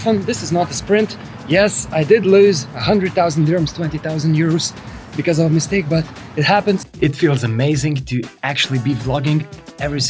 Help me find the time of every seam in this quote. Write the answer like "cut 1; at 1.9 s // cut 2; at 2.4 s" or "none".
cut 1; at 2.7 s // cut 2; at 6.9 s